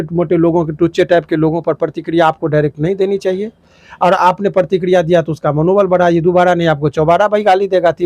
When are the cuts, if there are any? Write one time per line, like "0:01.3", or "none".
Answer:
none

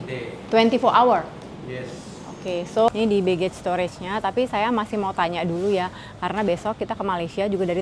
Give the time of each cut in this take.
0:02.9

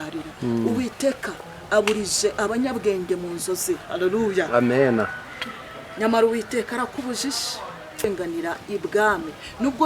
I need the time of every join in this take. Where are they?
0:08.0

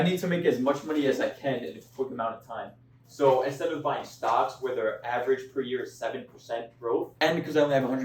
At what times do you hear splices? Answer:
0:07.1

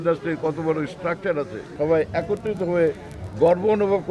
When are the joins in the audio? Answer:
0:01.6

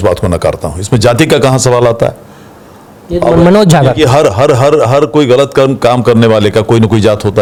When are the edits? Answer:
none

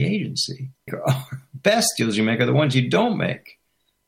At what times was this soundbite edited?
0:00.9

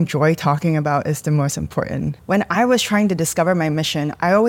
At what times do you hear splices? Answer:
0:02.2

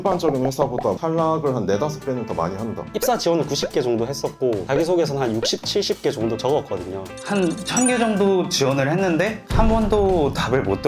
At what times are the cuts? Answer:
0:03.0
0:07.1

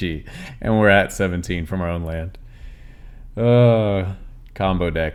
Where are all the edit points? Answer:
none

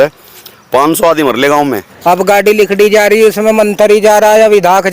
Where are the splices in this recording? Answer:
0:01.9

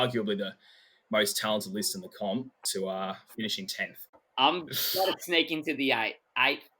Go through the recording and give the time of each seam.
0:04.2

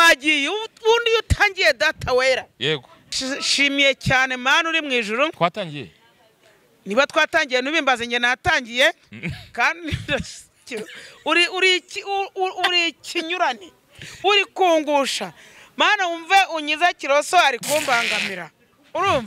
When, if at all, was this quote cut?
0:03.1

